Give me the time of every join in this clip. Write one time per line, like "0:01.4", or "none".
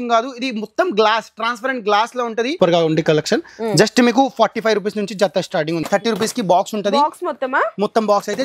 0:02.5
0:05.8